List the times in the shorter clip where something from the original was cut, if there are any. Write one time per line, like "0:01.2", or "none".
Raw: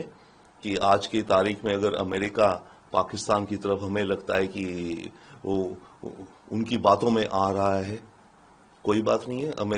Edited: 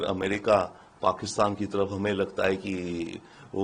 none

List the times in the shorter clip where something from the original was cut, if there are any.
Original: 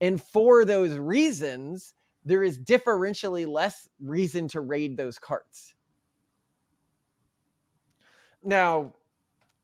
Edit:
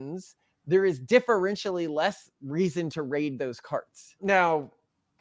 0:04.0

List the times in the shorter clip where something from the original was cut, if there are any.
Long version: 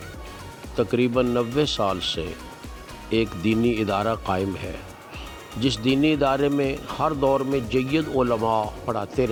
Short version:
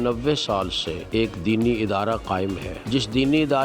0:00.9
0:02.7

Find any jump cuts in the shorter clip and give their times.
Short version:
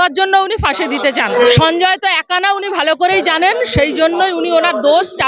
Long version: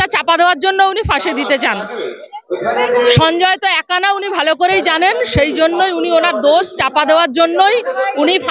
0:01.3

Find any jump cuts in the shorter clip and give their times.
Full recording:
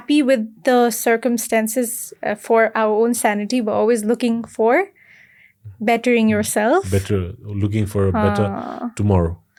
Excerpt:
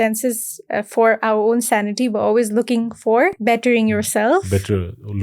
0:03.4

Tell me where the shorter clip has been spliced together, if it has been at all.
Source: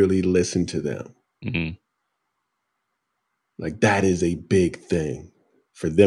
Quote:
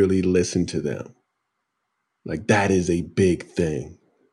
0:01.2

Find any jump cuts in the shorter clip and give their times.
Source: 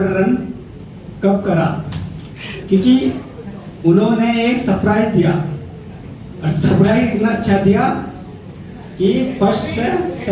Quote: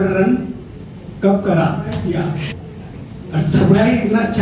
0:02.0

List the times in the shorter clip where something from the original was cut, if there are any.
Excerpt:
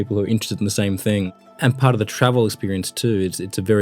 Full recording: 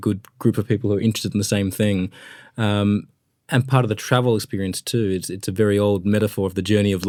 0:01.4

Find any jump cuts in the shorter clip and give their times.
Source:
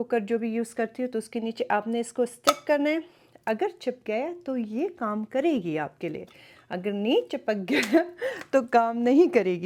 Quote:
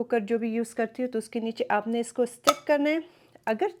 none

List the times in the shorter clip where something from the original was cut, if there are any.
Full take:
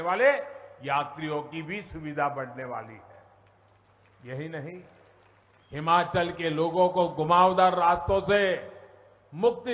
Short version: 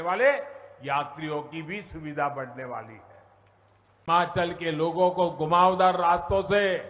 0:04.1

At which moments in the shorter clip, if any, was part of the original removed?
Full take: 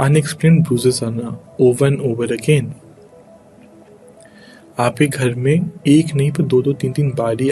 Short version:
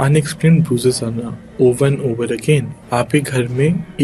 0:02.8

